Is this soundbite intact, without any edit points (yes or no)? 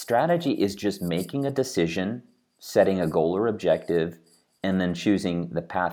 yes